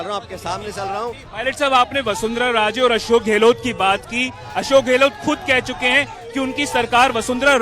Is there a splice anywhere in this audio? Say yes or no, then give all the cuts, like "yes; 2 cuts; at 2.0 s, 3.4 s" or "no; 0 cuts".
yes; 1 cut; at 1.2 s